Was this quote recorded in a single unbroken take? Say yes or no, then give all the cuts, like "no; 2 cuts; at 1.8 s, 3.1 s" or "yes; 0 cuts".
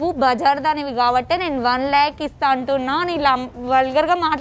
yes; 0 cuts